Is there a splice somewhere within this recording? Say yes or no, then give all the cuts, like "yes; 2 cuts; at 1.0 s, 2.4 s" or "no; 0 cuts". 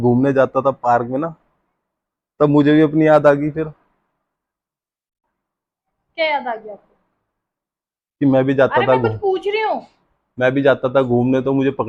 no; 0 cuts